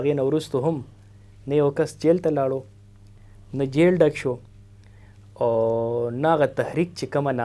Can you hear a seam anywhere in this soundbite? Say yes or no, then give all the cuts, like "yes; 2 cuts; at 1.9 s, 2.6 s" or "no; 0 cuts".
no; 0 cuts